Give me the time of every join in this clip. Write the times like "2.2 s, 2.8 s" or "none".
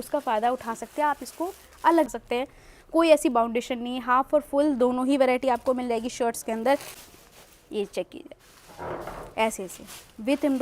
2.1 s, 6.9 s